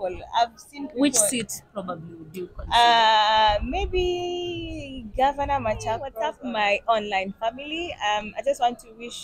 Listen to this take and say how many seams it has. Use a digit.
1